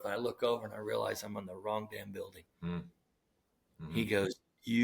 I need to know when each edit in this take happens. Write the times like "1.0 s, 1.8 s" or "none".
2.4 s